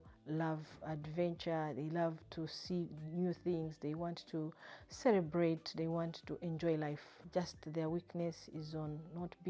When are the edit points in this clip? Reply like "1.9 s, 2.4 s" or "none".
7.2 s